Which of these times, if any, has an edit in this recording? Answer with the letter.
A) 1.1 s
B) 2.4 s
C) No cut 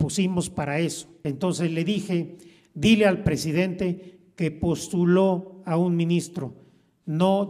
A